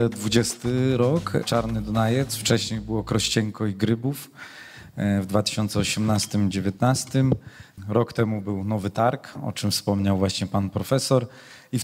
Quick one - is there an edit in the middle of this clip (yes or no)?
no